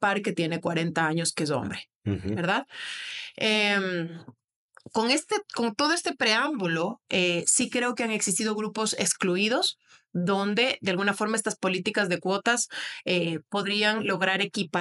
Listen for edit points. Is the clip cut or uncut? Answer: uncut